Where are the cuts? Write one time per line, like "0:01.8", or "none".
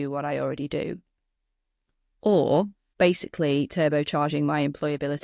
0:02.8

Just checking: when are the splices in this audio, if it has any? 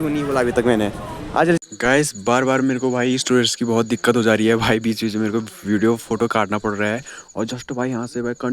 0:01.6

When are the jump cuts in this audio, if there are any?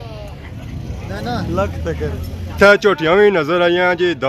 0:02.4

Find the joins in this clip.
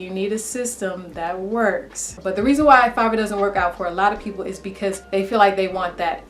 0:02.1

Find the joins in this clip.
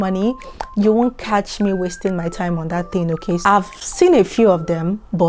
0:03.4

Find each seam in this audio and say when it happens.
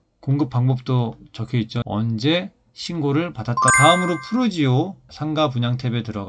0:01.8
0:03.7
0:05.1

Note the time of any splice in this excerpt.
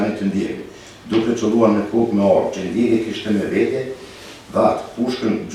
none

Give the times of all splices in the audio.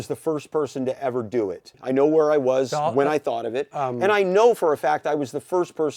0:01.8

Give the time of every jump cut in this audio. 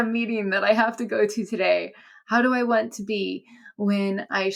none

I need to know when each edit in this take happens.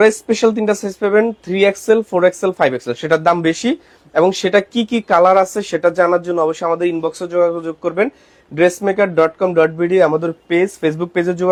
none

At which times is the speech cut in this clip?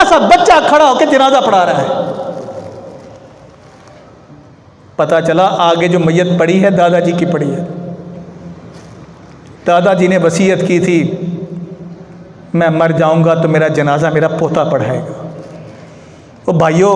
none

